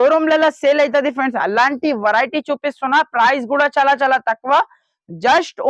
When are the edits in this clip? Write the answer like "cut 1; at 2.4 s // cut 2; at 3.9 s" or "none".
none

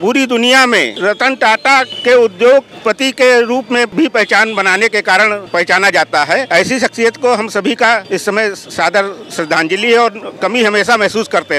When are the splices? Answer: cut 1; at 0.9 s // cut 2; at 1.9 s // cut 3; at 2.7 s // cut 4; at 3.9 s // cut 5; at 5.4 s // cut 6; at 6.5 s // cut 7; at 8.0 s

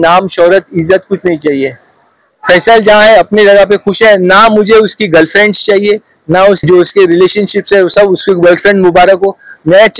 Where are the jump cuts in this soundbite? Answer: cut 1; at 6.6 s

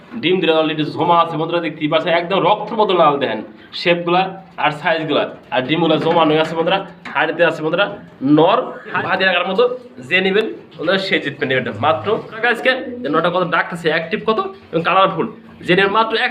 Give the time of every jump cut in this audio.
cut 1; at 9.0 s // cut 2; at 12.4 s

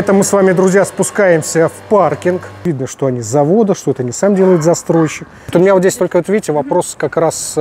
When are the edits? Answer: cut 1; at 2.6 s // cut 2; at 5.5 s

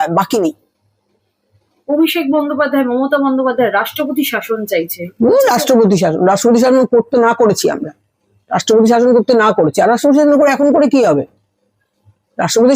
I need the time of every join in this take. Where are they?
none

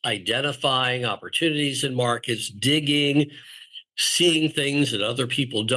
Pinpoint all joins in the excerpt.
none

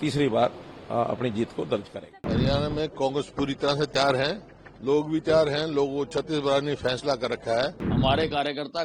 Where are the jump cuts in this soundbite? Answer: cut 1; at 2.0 s // cut 2; at 7.8 s

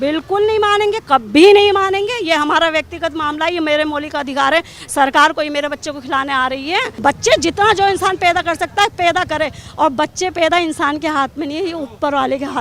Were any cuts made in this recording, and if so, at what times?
cut 1; at 6.9 s

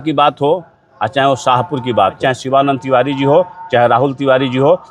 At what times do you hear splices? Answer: cut 1; at 2.2 s

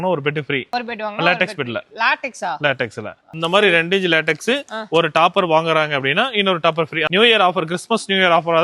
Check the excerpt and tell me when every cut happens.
cut 1; at 3.3 s // cut 2; at 7.1 s

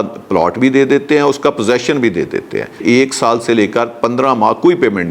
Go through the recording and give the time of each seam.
cut 1; at 2.8 s

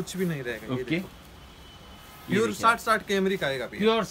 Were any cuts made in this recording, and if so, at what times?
none

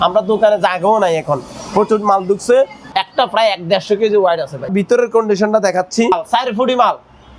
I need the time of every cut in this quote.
cut 1; at 2.8 s // cut 2; at 4.7 s // cut 3; at 6.1 s

